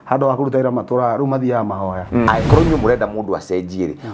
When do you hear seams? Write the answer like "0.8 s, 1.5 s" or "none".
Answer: 2.3 s